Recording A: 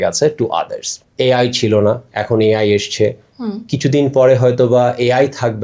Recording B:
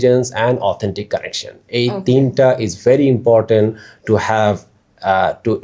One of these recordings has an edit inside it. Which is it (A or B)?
A